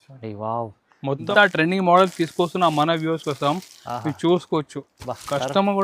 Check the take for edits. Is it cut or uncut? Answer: cut